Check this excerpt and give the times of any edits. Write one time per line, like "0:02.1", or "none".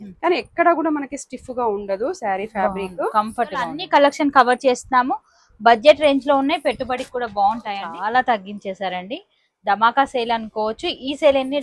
0:03.8
0:07.9